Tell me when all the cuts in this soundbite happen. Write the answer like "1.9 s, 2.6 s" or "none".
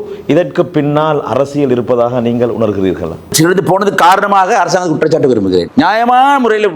3.3 s